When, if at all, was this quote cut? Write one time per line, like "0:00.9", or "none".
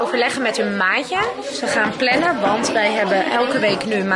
none

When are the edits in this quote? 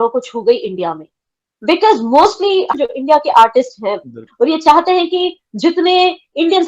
0:02.7
0:04.2

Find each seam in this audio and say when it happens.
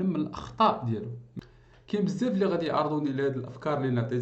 0:01.5

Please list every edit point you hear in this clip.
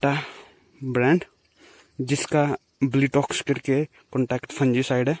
none

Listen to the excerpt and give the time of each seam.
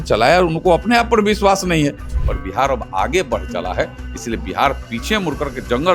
0:02.1

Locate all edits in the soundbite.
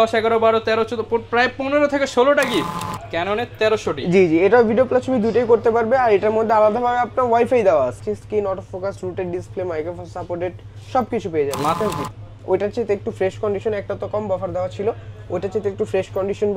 0:02.8
0:08.0
0:11.8

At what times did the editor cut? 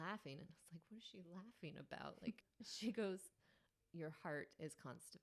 0:02.4
0:03.8

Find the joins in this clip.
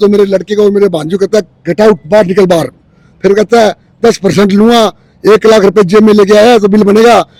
none

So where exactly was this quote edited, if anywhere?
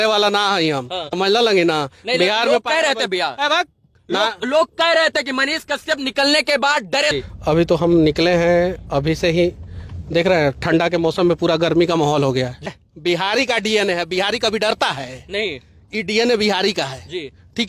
0:01.0
0:07.1
0:12.7

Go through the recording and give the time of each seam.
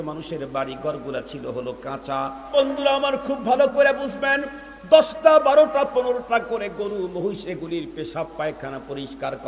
0:02.6

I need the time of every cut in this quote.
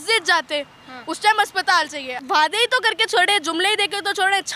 0:02.1

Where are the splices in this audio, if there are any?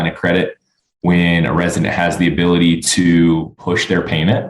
0:03.6

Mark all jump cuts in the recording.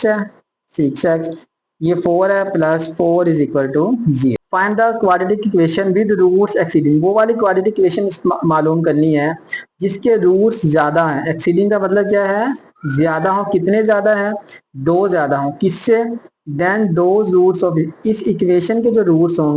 0:04.4

